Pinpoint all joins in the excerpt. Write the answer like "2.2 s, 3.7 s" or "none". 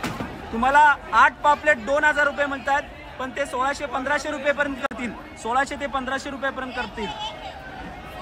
none